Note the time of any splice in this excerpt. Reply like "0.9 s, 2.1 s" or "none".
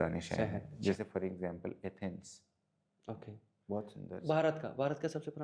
none